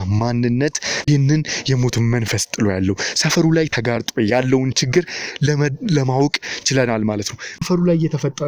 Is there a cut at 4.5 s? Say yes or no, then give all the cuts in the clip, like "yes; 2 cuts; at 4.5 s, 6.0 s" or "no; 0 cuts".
no; 2 cuts; at 1.0 s, 7.4 s